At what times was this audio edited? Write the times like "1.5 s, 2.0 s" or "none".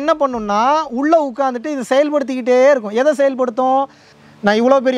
4.1 s

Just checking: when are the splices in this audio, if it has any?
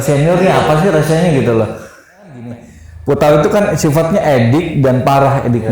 2.5 s

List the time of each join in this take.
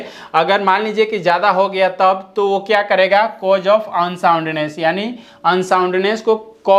none

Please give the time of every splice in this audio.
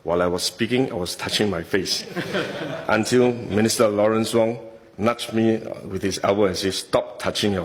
none

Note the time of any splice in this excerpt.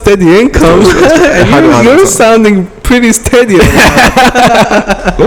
none

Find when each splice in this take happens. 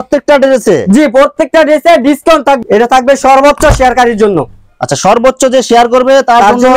2.6 s

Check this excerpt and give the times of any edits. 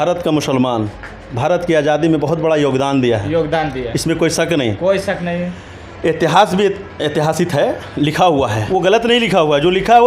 8.6 s

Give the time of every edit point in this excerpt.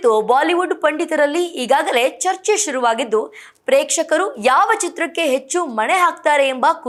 none

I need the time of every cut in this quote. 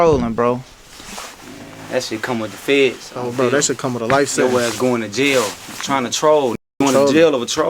none

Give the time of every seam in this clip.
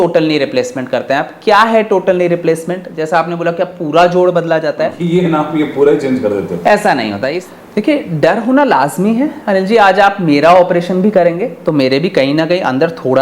5.0 s, 7.3 s

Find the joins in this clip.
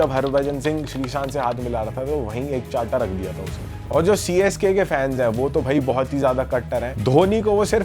3.7 s

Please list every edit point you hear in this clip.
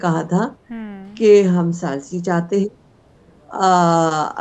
none

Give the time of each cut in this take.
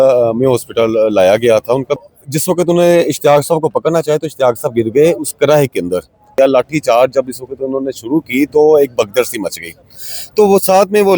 2.0 s, 6.3 s

